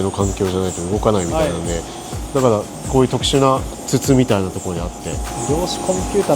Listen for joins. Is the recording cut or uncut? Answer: cut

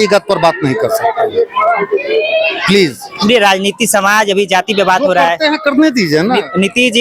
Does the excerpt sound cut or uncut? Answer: uncut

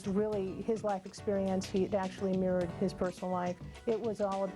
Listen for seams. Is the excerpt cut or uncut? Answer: cut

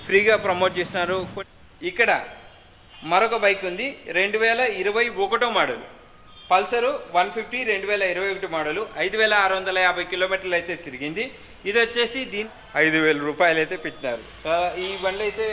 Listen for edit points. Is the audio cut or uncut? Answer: cut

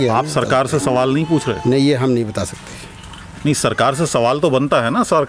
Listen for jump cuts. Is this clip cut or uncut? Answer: uncut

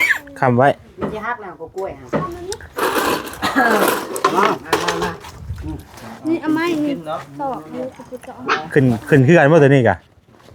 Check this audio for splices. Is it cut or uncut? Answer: cut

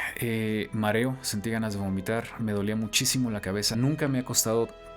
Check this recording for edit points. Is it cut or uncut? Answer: cut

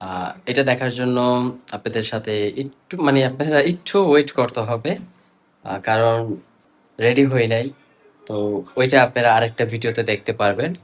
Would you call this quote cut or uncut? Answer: uncut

